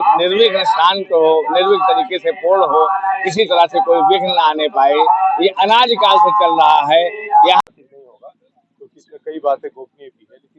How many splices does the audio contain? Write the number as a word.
one